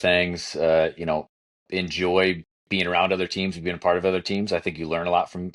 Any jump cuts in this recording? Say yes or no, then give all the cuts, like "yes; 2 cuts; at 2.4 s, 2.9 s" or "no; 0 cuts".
no; 0 cuts